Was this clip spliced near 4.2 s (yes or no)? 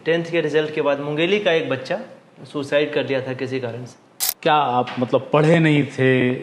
yes